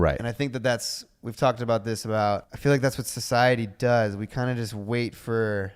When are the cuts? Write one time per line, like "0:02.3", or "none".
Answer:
0:02.5